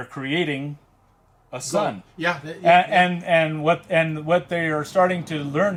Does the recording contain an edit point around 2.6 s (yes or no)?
no